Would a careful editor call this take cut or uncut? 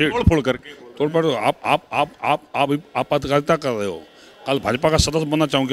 uncut